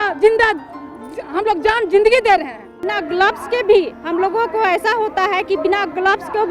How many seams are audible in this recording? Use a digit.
1